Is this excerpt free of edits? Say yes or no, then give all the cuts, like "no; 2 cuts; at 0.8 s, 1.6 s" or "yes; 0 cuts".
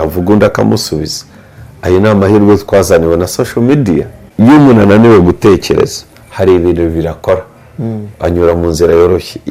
no; 1 cut; at 4.2 s